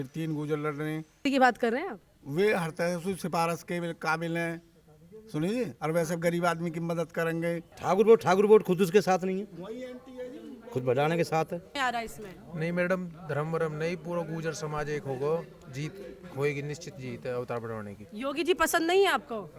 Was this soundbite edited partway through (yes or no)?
yes